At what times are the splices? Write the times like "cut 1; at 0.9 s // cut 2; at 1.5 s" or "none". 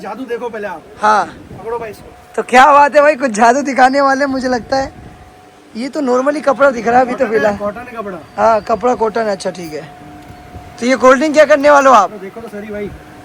none